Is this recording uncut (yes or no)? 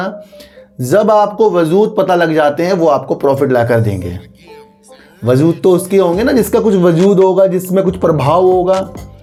yes